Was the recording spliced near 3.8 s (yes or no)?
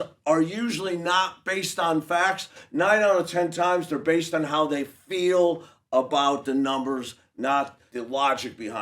no